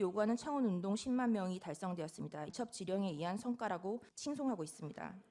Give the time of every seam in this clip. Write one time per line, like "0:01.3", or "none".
0:02.5
0:04.1